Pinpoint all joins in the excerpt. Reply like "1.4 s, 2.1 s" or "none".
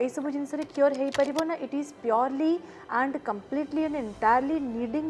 none